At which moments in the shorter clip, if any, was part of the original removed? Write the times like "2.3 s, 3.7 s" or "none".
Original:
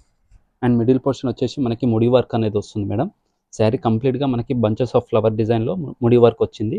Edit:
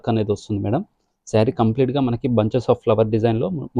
none

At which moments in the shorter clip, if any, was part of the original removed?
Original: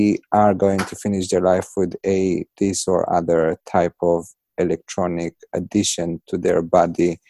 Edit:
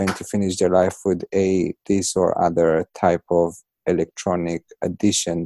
none

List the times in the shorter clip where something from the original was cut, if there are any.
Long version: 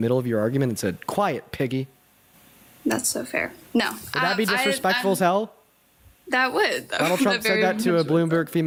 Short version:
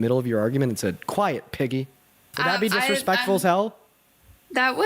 2.2 s

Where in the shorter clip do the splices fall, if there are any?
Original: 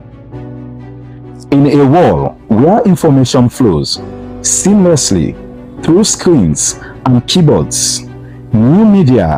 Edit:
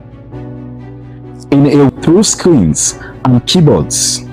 1.9 s

